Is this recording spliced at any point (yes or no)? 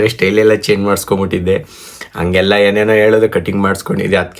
no